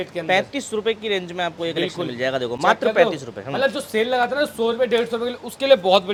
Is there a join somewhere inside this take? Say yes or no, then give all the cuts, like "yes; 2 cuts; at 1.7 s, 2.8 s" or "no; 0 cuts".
no; 0 cuts